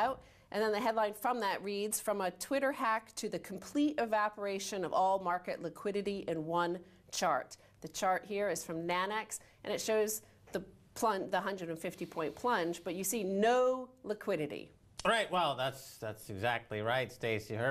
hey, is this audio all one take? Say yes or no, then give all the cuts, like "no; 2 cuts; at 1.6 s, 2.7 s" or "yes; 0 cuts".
yes; 0 cuts